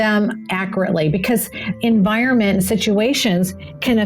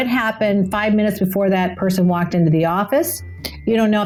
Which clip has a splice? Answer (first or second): first